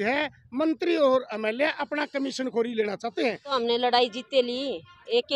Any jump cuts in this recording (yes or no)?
yes